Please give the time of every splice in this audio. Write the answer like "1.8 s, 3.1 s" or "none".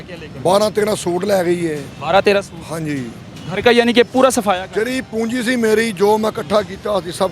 none